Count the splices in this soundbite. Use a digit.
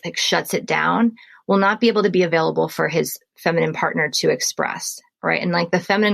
1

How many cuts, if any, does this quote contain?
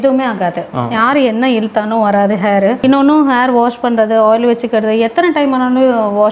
1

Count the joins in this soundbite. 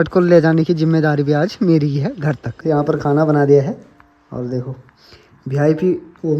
1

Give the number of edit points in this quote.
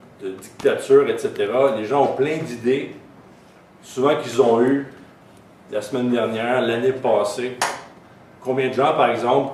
0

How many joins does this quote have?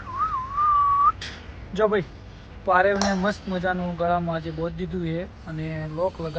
0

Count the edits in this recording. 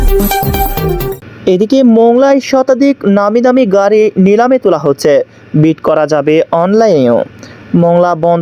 0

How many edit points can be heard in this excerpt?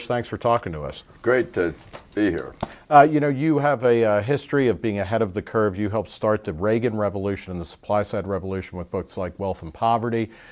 1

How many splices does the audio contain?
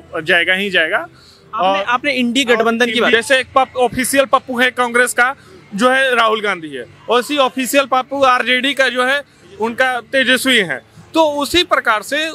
1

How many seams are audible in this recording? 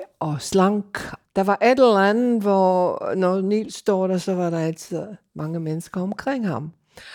1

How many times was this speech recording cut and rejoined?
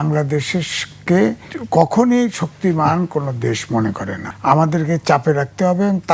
2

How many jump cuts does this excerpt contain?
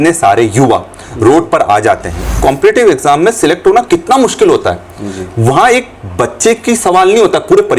1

